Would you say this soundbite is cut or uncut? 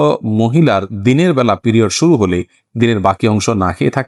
uncut